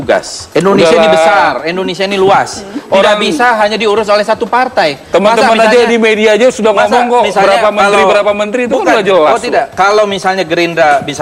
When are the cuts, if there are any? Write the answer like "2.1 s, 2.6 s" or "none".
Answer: none